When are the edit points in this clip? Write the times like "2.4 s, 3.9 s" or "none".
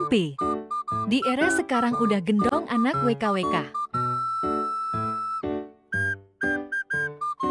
none